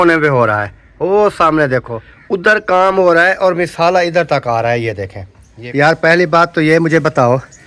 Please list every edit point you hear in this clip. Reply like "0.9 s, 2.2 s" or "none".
2.6 s, 5.9 s